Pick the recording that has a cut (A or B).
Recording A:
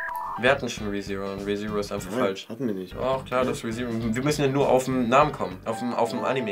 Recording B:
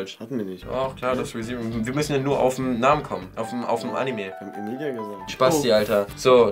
B